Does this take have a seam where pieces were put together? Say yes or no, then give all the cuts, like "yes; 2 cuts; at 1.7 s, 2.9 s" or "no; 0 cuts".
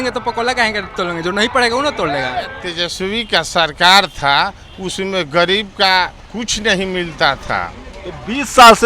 yes; 1 cut; at 2.6 s